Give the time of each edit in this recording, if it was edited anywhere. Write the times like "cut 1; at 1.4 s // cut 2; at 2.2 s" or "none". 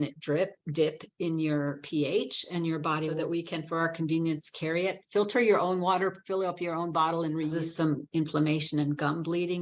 cut 1; at 3.1 s // cut 2; at 7.6 s